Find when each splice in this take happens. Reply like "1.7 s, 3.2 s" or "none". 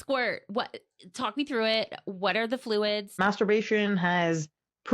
3.2 s